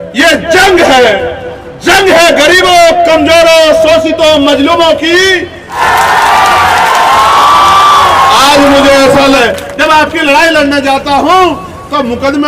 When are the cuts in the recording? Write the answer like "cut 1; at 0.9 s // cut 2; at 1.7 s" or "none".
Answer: cut 1; at 5.8 s // cut 2; at 9.4 s